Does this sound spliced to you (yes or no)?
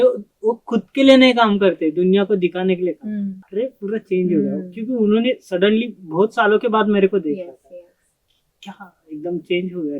yes